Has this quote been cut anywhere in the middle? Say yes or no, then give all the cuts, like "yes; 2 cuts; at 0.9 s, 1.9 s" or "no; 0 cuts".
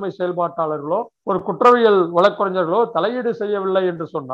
yes; 1 cut; at 1.1 s